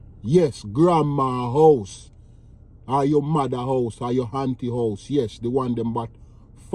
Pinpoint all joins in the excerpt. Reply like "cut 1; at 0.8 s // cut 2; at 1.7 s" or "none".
none